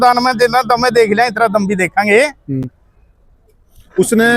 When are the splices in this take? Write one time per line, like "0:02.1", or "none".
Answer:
none